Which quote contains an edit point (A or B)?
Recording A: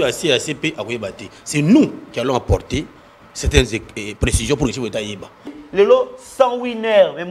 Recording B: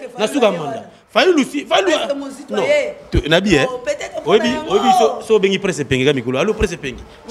A